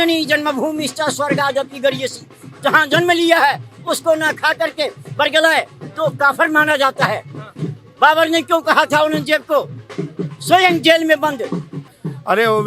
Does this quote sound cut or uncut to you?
cut